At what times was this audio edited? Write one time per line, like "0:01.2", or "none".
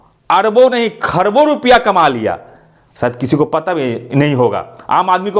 none